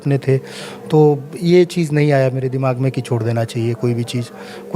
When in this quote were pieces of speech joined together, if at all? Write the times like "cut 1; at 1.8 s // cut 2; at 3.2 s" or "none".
none